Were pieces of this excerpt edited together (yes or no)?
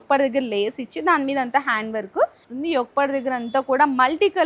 yes